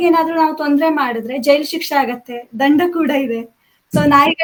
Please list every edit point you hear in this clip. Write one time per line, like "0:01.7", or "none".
none